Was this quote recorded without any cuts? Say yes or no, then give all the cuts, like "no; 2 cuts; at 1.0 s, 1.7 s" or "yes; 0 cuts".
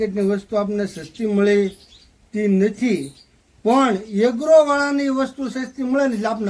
yes; 0 cuts